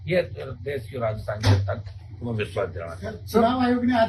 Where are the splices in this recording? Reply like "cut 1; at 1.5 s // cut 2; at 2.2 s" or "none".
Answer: none

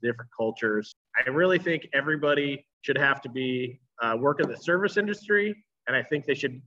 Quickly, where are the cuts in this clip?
cut 1; at 1.0 s // cut 2; at 2.7 s

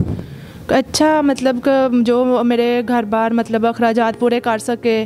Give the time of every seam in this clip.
none

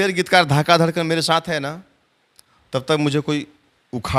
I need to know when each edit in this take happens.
none

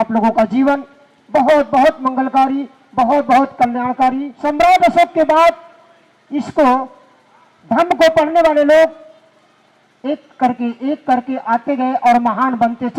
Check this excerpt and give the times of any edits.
cut 1; at 4.3 s

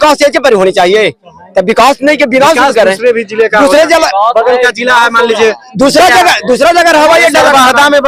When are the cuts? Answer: none

